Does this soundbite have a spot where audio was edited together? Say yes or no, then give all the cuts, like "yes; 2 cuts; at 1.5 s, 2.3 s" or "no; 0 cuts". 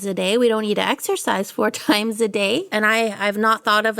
yes; 1 cut; at 2.7 s